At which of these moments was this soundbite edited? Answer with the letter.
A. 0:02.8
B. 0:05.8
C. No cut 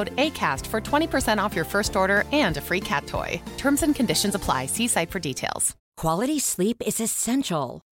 B